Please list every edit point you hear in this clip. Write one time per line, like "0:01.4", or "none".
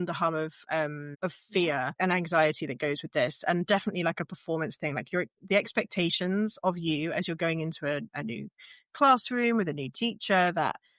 0:01.1
0:02.0